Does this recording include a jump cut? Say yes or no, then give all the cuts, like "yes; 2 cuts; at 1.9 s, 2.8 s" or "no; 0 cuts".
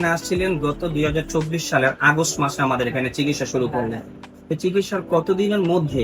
no; 0 cuts